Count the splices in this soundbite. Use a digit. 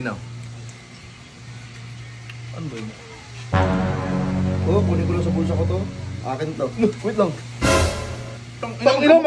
0